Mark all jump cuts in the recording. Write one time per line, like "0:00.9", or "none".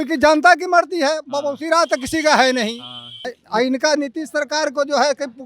0:03.3